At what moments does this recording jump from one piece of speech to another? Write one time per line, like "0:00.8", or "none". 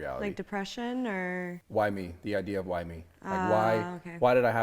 0:01.4

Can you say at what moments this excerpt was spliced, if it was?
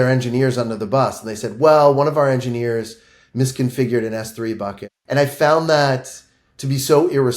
0:04.8

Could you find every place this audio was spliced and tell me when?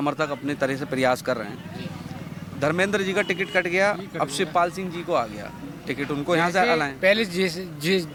none

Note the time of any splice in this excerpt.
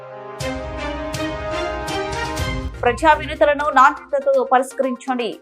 none

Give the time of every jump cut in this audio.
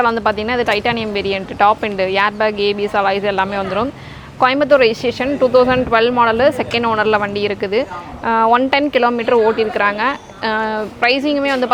none

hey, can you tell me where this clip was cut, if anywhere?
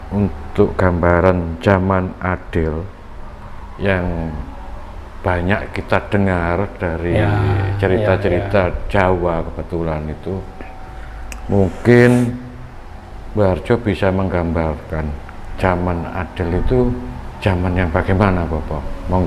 none

